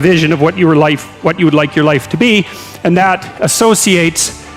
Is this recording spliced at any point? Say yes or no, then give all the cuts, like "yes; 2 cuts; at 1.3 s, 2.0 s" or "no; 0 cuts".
no; 0 cuts